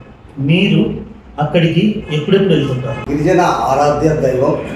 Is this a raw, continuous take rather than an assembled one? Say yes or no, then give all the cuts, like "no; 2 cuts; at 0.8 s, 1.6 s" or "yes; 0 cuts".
no; 1 cut; at 3.0 s